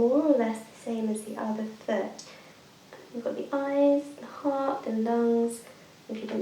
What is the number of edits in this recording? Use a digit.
0